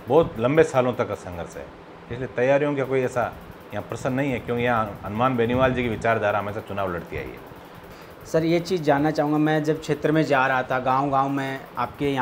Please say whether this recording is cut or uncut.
uncut